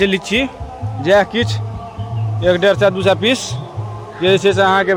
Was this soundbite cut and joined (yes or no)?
no